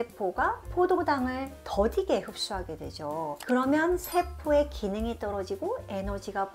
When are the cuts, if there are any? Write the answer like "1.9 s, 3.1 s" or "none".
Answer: none